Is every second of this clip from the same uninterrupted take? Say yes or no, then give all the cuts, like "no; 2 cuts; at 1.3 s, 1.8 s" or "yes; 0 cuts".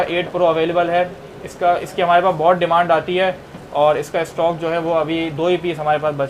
yes; 0 cuts